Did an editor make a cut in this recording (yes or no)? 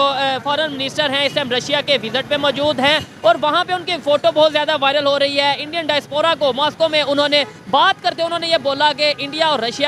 no